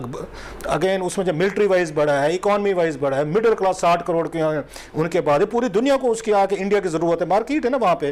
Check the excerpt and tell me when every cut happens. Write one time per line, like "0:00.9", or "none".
none